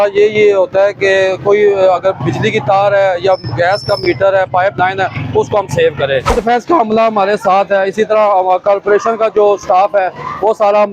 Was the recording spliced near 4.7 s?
no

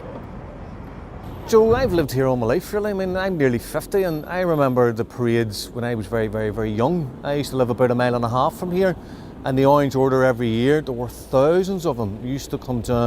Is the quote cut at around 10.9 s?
yes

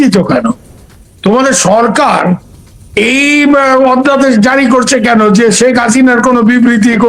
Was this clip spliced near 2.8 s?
no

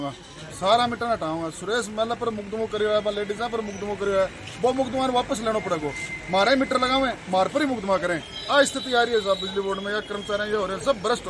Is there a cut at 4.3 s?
no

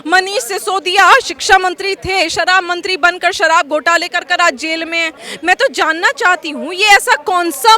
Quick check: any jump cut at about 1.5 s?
no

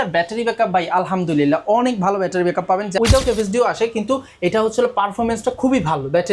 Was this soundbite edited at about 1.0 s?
no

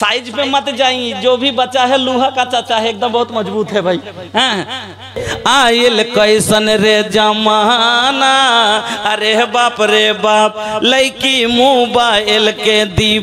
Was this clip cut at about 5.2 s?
yes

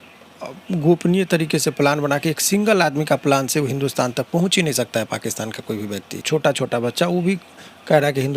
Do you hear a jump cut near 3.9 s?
no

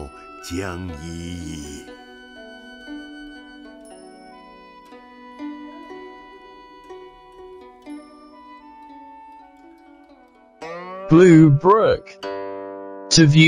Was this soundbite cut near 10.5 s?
yes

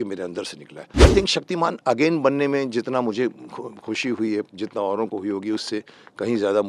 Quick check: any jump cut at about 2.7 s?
no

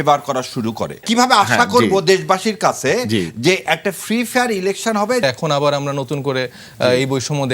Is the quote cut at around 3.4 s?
no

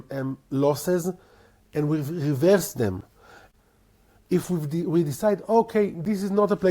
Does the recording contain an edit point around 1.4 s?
no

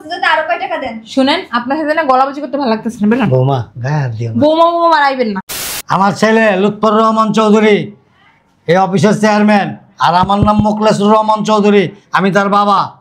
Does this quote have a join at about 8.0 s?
no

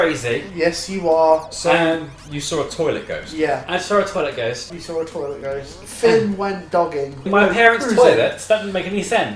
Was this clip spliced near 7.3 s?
yes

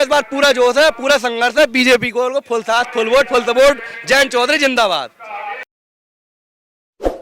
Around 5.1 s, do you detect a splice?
no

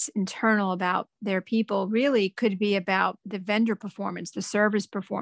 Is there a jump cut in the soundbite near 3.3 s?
yes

